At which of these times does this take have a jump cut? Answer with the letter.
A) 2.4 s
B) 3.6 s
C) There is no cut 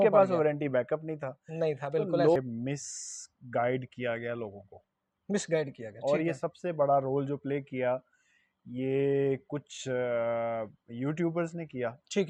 A